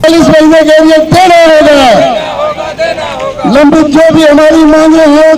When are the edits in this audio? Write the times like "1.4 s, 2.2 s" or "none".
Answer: none